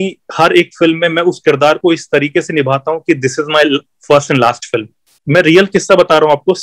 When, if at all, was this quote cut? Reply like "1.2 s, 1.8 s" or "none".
5.1 s